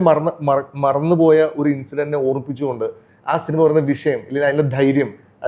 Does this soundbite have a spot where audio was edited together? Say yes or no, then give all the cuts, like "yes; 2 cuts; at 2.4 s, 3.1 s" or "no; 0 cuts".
no; 0 cuts